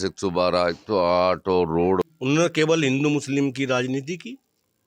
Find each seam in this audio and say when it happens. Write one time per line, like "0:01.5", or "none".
0:02.0